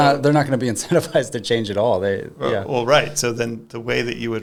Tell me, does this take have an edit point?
no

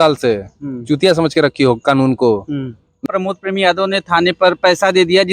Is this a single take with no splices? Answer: no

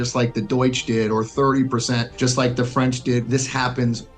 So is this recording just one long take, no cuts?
no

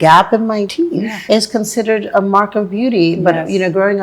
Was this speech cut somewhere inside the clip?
yes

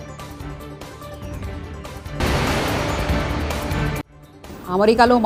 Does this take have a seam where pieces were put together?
no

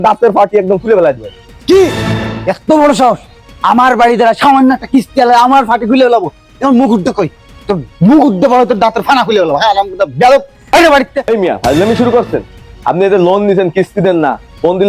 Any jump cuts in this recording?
yes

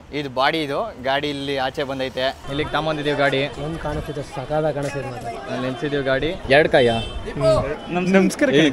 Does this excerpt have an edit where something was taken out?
yes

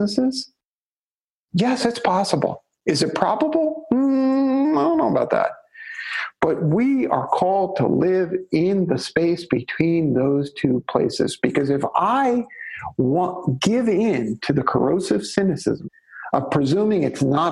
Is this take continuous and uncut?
no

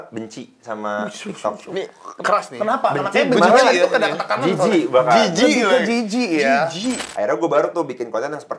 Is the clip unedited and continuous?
no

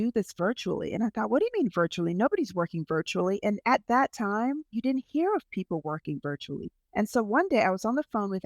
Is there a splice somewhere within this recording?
yes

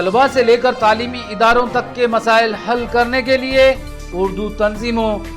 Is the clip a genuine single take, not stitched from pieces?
yes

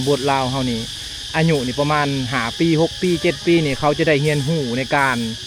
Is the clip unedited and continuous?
yes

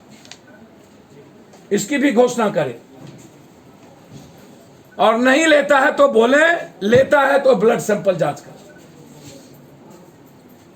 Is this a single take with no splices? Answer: yes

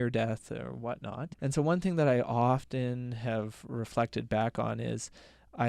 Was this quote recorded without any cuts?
no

